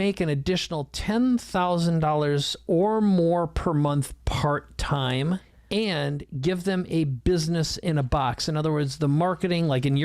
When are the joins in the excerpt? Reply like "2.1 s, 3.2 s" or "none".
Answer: 5.5 s